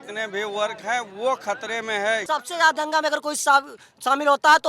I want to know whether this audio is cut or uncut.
cut